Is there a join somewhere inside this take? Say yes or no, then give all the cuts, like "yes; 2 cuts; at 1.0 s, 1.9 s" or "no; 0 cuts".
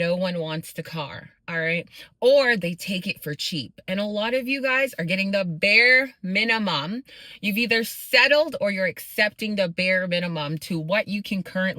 no; 0 cuts